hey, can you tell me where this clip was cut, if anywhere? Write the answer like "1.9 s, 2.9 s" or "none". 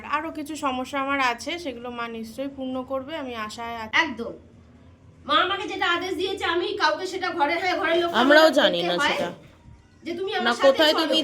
3.9 s